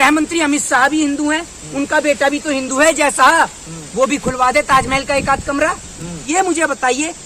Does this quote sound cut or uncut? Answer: cut